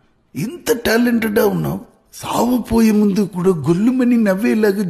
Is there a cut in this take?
no; 0 cuts

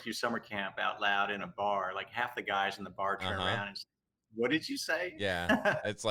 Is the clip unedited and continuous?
yes; 0 cuts

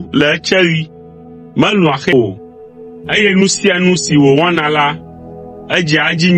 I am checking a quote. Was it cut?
yes; 1 cut; at 2.1 s

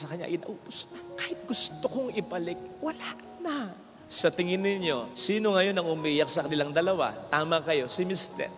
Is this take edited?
no; 0 cuts

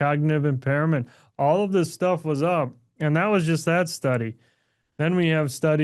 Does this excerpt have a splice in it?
no; 0 cuts

